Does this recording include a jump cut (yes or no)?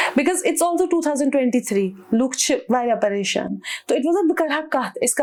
no